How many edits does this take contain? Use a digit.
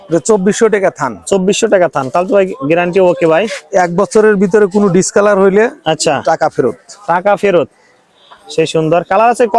0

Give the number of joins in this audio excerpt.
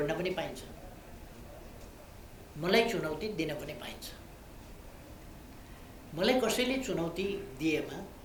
0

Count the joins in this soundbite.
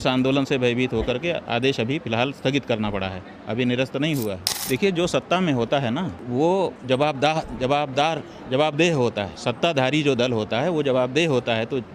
4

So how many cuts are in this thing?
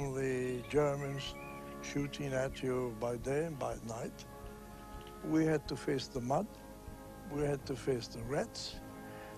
1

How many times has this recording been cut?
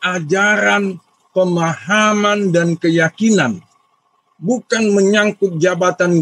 0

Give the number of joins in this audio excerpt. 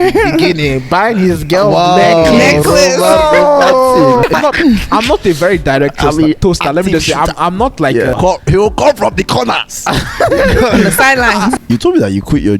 3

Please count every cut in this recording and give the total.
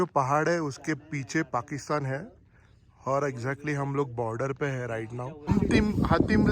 1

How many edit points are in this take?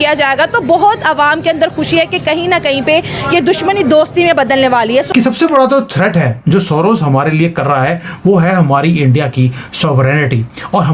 1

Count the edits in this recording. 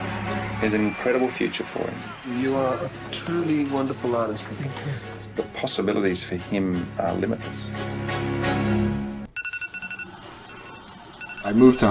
1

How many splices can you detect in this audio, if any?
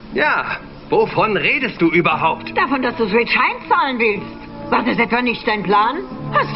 1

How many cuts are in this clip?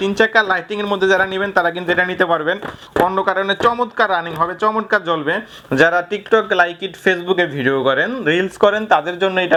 0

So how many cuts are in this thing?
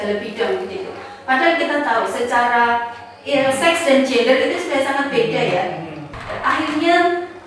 1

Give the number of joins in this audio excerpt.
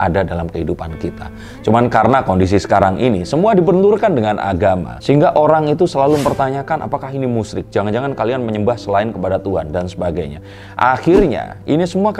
0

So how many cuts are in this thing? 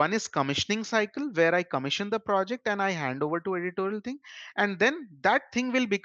0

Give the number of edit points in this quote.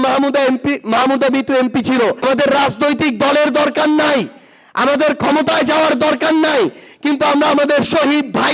1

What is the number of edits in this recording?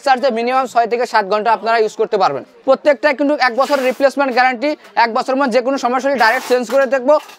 1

